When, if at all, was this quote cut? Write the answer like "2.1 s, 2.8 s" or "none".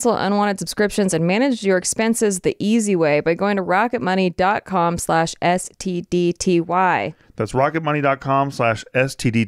none